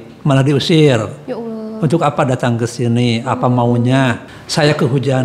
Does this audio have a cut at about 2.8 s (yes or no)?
no